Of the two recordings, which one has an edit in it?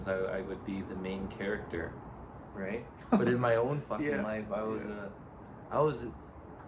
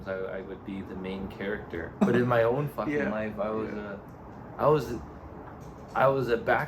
second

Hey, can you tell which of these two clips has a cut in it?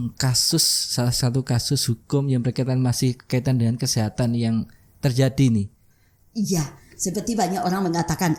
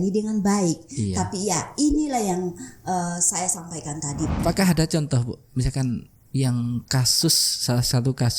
second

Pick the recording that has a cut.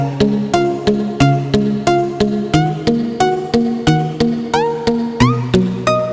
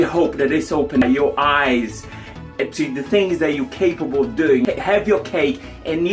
second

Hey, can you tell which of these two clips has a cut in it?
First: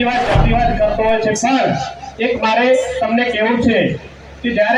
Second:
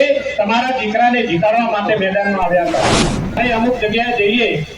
second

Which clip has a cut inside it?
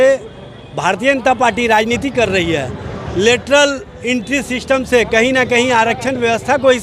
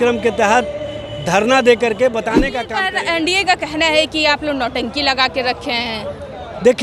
second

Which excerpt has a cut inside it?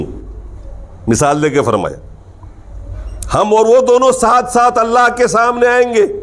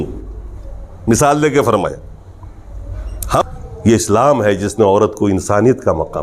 second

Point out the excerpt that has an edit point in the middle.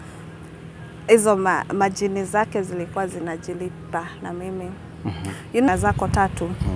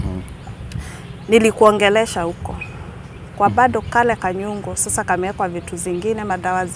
first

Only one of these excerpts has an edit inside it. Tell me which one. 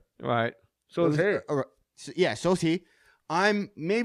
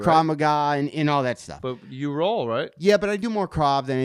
second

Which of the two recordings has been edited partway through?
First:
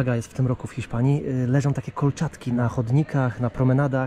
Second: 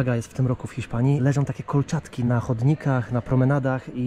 second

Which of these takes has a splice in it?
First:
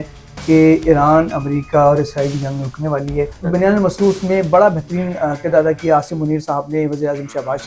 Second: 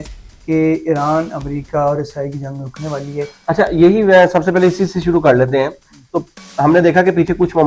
first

